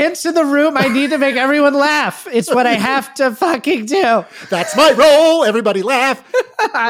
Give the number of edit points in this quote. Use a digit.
0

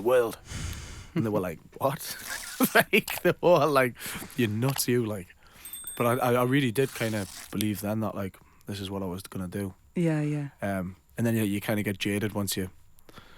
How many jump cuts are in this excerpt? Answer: 0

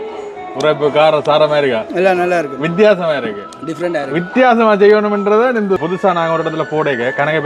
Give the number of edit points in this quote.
1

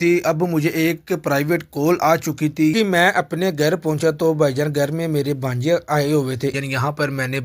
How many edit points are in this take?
2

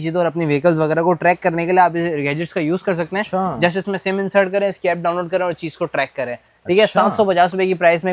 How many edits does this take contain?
0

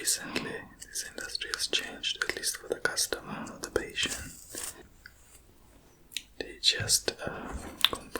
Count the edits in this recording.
1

